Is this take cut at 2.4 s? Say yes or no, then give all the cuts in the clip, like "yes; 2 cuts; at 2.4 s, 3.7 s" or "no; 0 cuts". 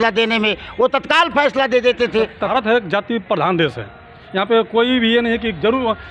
yes; 1 cut; at 2.4 s